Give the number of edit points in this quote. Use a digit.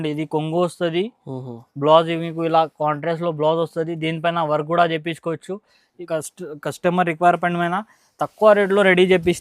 1